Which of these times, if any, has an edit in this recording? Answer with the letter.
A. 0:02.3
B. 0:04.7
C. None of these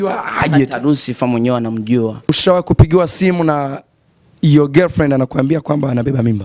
A